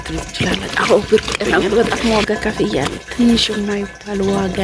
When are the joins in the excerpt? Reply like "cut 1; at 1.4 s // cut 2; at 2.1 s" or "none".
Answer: cut 1; at 1.6 s